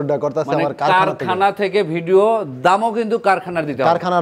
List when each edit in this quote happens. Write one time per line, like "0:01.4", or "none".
none